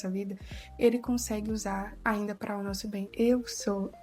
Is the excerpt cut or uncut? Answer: cut